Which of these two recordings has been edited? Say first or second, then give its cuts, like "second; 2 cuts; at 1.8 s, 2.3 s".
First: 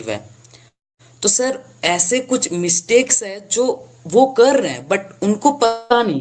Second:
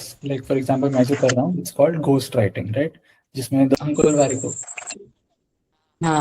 second; 1 cut; at 3.8 s